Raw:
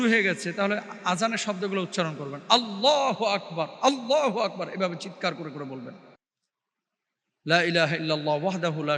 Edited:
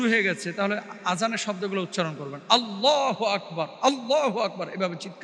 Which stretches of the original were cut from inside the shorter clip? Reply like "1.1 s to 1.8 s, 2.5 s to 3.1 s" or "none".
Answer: none